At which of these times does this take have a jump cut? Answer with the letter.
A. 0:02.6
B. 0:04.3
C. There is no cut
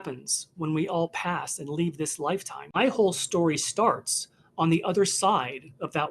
A